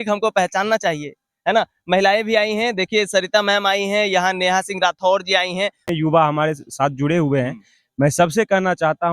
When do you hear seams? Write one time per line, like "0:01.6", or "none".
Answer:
0:05.8